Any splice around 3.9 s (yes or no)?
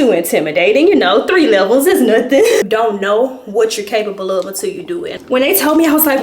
no